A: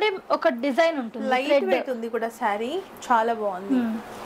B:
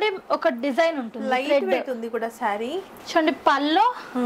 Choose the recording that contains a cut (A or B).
B